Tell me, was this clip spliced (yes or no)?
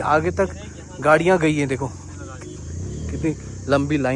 no